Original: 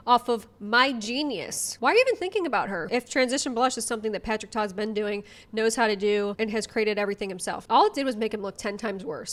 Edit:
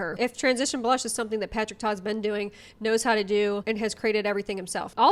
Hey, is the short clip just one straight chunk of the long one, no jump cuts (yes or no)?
yes